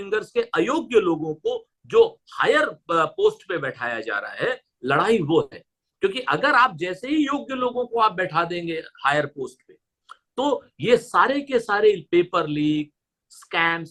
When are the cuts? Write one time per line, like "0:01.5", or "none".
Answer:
none